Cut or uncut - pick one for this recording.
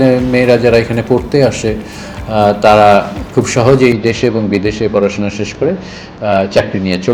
uncut